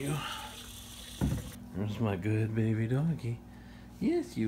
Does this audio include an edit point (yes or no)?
yes